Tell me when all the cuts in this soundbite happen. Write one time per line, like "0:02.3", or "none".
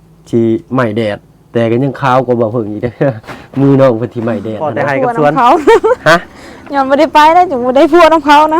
0:04.7